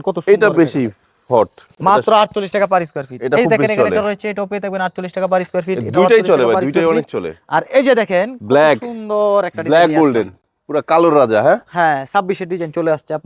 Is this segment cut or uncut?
uncut